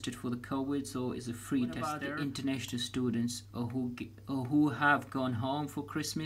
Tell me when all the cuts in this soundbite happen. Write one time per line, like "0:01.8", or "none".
0:02.1